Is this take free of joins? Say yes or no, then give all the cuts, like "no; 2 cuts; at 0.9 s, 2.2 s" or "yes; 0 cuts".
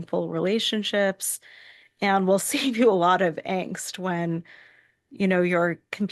yes; 0 cuts